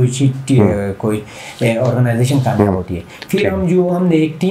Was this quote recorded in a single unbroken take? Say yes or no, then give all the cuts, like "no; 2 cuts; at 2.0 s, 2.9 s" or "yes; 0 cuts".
yes; 0 cuts